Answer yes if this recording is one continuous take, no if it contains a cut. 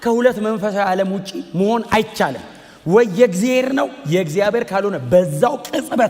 yes